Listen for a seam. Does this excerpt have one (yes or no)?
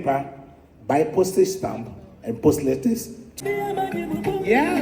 yes